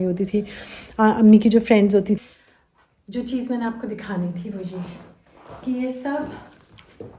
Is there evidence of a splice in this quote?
yes; 1 cut; at 2.2 s

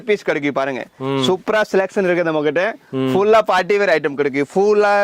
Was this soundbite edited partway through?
no; 0 cuts

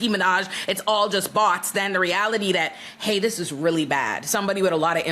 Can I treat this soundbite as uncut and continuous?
yes; 0 cuts

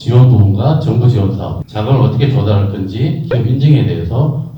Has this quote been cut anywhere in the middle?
yes; 1 cut; at 1.7 s

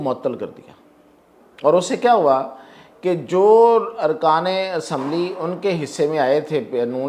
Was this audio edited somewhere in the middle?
no; 0 cuts

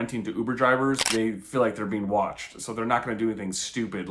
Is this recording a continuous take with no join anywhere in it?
no; 1 cut; at 1.1 s

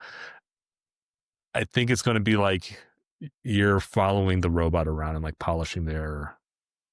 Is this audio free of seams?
yes; 0 cuts

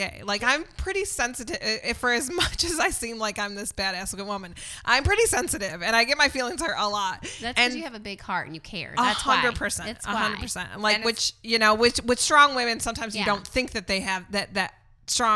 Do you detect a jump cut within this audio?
no; 0 cuts

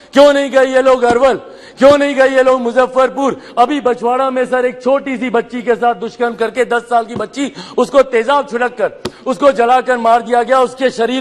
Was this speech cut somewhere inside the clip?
no; 0 cuts

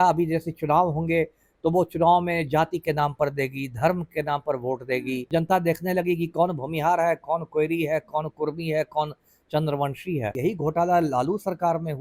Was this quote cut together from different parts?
yes; 2 cuts; at 5.2 s, 10.4 s

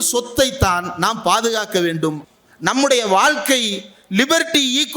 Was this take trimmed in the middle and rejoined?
yes; 1 cut; at 2.2 s

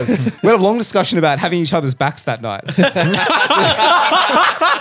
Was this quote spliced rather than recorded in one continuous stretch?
no; 0 cuts

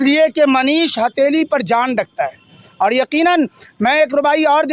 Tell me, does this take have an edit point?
no; 0 cuts

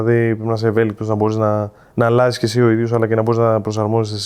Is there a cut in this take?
no; 0 cuts

